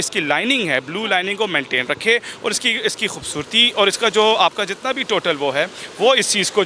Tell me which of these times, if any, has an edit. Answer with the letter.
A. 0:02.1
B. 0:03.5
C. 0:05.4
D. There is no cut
D